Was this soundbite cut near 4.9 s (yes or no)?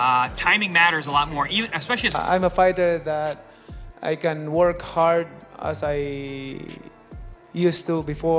no